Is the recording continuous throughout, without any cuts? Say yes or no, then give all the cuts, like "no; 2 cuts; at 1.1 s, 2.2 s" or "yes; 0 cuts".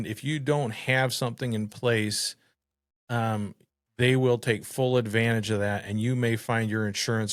yes; 0 cuts